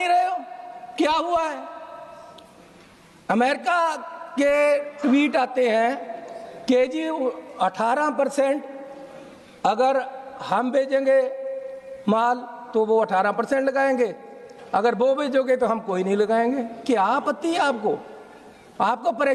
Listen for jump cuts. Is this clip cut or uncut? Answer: uncut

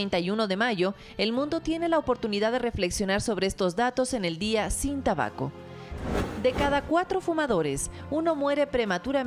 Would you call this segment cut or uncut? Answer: cut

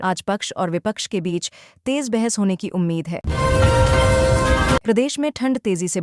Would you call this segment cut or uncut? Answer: uncut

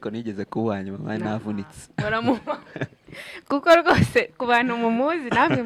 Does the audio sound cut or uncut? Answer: uncut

